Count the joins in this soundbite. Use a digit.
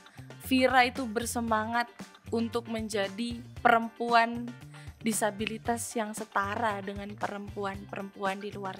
0